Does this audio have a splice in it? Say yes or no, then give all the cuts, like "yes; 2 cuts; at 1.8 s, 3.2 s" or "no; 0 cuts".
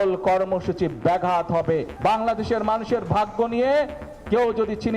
yes; 1 cut; at 1.9 s